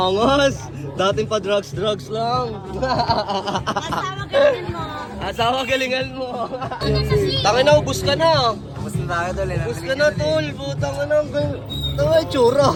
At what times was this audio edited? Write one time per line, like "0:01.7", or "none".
none